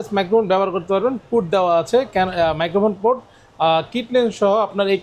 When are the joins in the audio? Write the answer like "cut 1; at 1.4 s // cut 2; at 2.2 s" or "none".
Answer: none